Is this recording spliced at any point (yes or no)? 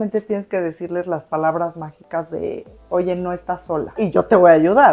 yes